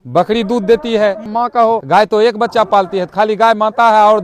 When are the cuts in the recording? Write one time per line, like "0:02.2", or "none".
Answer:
none